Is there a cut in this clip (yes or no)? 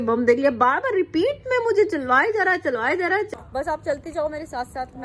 yes